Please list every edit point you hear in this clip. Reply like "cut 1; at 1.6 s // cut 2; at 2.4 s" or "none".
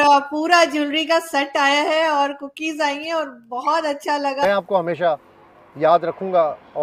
cut 1; at 4.4 s